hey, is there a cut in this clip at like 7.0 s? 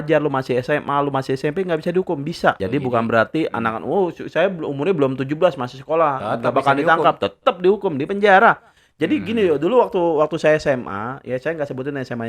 no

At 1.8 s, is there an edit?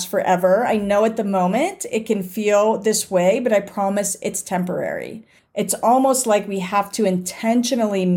no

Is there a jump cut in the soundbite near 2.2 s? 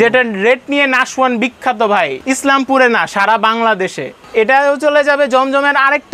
yes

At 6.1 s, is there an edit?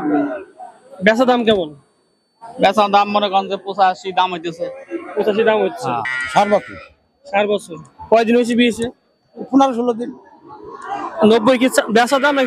yes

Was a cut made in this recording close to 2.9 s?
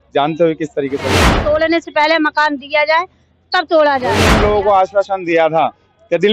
no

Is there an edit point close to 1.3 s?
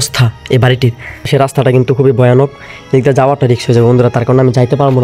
yes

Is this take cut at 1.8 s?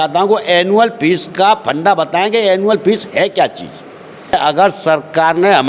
no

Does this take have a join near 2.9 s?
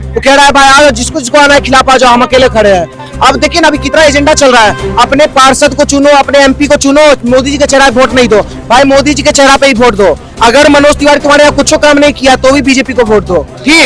no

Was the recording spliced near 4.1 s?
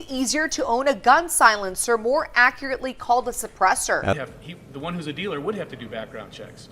yes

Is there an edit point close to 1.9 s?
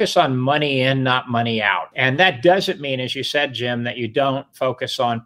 yes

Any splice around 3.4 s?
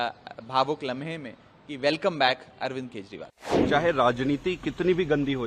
yes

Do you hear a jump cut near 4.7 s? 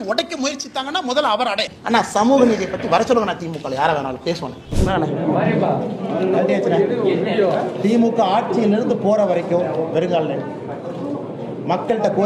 yes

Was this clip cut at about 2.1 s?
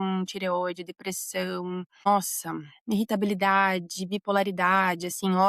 yes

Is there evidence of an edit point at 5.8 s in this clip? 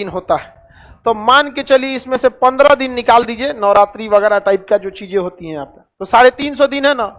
no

